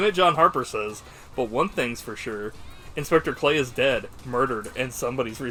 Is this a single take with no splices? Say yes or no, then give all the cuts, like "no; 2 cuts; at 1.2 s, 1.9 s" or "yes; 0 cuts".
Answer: yes; 0 cuts